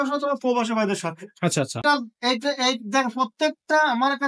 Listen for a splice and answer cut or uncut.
cut